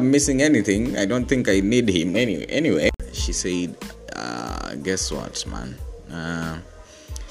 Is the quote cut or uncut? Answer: cut